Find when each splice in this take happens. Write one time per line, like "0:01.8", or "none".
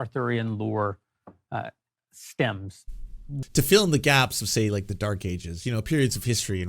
0:03.3